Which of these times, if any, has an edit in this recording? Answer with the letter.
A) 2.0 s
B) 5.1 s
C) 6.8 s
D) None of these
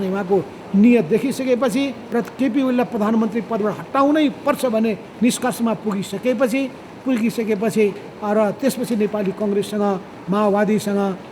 A